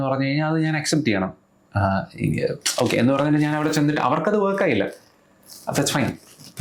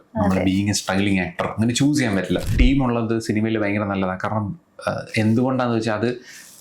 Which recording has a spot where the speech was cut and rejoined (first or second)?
second